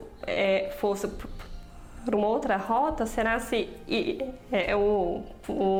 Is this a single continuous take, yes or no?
yes